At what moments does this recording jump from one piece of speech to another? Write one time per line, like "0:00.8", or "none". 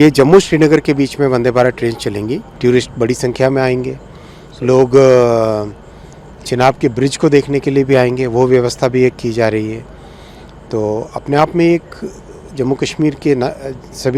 0:02.5